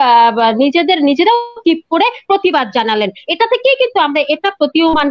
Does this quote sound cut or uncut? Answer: uncut